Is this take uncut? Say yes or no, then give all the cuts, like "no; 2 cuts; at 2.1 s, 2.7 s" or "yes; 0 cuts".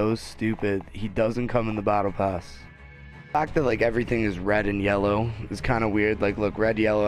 no; 1 cut; at 3.3 s